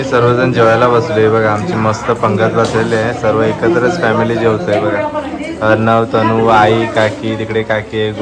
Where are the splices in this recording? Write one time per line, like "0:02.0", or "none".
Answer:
none